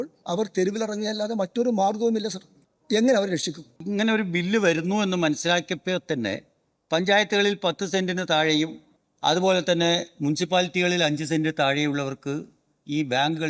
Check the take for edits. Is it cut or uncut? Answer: cut